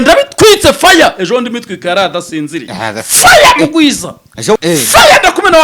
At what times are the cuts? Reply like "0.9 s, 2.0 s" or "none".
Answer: 4.6 s